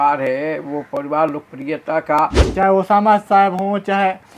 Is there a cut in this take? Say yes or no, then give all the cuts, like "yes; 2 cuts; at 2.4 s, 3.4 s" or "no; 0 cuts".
yes; 1 cut; at 2.4 s